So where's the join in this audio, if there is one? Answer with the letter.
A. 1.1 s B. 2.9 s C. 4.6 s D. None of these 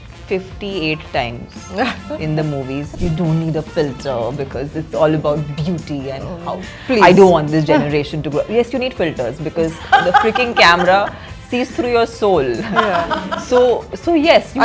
B